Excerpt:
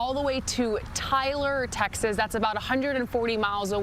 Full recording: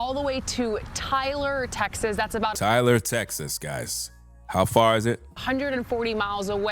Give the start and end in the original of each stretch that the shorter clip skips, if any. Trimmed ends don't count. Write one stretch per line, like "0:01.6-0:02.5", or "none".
0:02.6-0:05.3